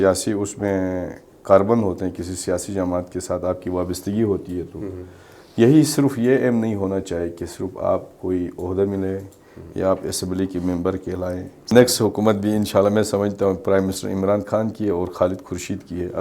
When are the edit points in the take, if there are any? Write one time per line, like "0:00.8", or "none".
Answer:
0:11.7